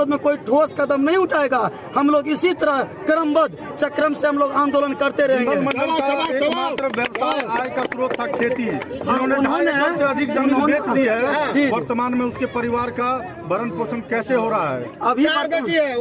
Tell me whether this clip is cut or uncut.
uncut